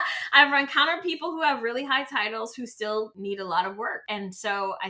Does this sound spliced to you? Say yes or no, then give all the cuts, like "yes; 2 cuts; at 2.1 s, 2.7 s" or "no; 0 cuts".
yes; 2 cuts; at 3.1 s, 4.0 s